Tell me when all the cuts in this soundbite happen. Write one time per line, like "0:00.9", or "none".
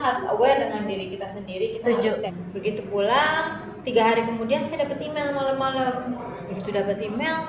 0:02.4